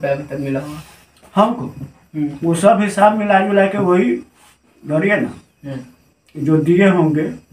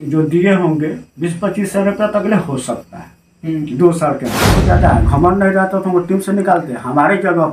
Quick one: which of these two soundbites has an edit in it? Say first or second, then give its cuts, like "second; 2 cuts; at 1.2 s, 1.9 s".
second; 1 cut; at 4.5 s